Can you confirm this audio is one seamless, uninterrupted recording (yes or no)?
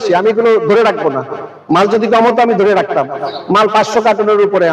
yes